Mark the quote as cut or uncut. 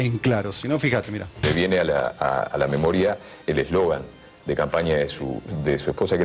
uncut